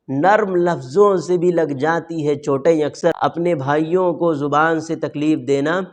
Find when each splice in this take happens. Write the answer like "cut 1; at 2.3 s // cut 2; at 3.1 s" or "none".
none